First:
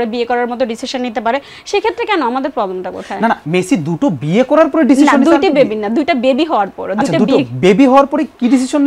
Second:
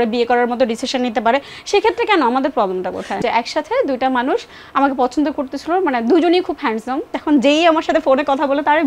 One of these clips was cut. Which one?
second; 2 cuts; at 3.1 s, 7.2 s

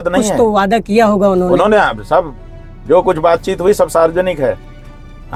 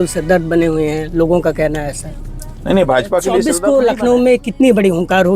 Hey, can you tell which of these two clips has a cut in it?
second; 1 cut; at 3.5 s

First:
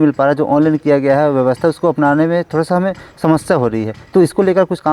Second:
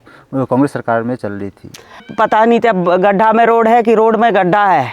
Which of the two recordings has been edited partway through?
second; 1 cut; at 2.1 s

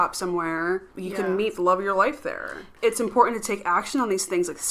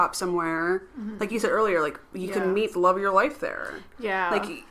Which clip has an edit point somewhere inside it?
first; 2 cuts; at 0.9 s, 2.7 s

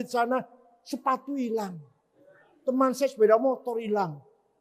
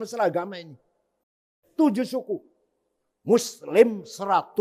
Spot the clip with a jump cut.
second; 1 cut; at 1.3 s

